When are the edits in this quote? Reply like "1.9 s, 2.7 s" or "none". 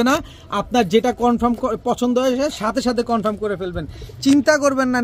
none